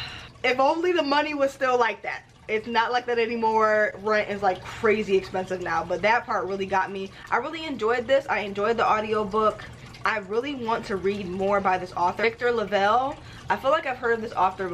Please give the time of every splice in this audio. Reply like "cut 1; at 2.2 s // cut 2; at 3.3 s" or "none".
none